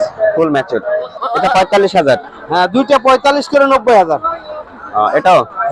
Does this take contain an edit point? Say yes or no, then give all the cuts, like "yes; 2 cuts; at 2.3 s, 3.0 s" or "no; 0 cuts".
yes; 1 cut; at 1.1 s